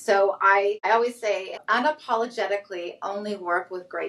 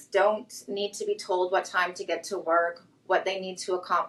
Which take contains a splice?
first; 1 cut; at 1.5 s

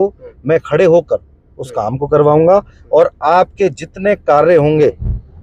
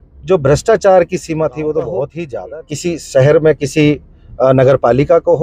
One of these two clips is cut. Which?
second; 1 cut; at 2.2 s

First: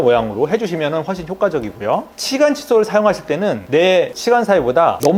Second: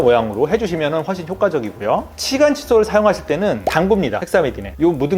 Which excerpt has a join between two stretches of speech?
second; 1 cut; at 3.7 s

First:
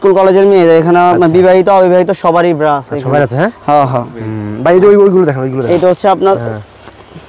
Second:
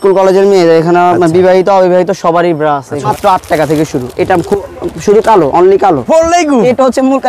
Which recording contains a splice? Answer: second; 2 cuts; at 3.1 s, 6.0 s

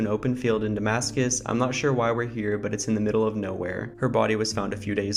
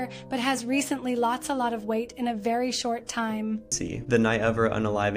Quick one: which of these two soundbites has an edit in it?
second; 1 cut; at 3.7 s

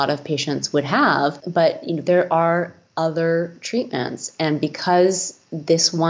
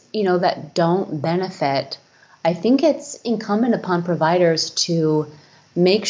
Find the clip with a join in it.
first; 1 cut; at 1.4 s

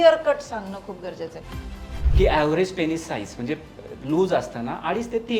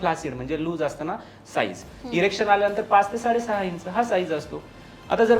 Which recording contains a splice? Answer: first; 1 cut; at 1.9 s

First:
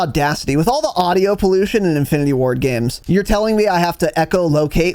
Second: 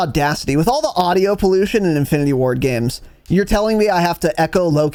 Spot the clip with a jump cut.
first; 1 cut; at 2.9 s

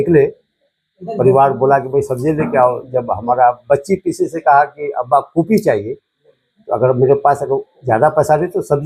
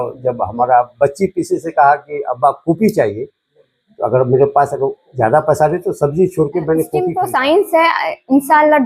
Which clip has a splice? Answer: second; 1 cut; at 7.1 s

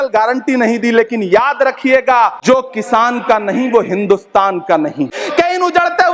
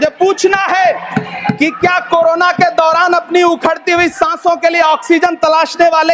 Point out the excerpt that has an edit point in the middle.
first; 2 cuts; at 2.4 s, 5.2 s

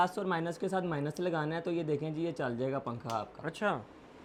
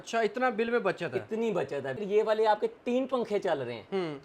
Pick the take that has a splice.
second; 1 cut; at 2.0 s

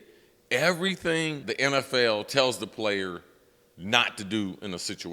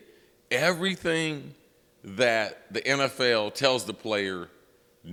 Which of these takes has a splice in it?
first; 1 cut; at 1.4 s

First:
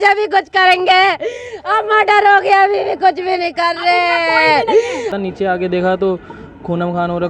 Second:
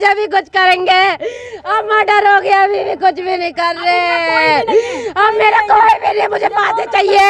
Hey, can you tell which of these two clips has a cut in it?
first; 1 cut; at 5.1 s

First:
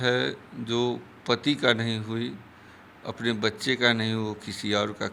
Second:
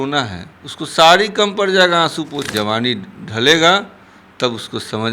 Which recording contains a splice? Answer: second; 1 cut; at 2.5 s

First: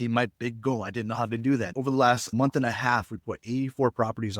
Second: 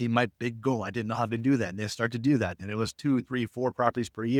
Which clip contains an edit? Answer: first; 1 cut; at 2.2 s

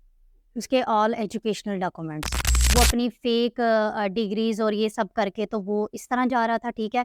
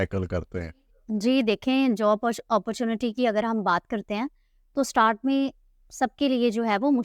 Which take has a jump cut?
first; 1 cut; at 2.5 s

